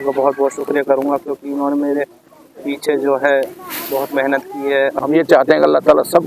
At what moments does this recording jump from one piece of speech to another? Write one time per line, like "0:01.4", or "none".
0:05.0